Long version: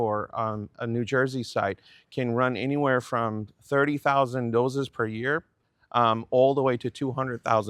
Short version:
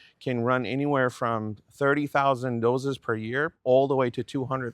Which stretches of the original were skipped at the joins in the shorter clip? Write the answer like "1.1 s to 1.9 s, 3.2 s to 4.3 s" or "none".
5.5 s to 6.2 s